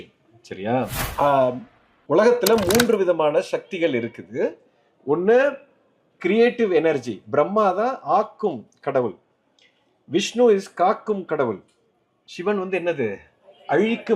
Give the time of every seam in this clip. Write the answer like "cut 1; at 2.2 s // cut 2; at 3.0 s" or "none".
cut 1; at 1.0 s